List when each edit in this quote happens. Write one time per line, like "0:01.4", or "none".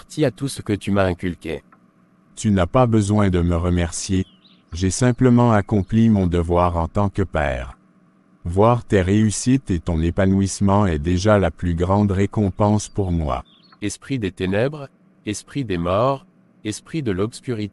0:13.7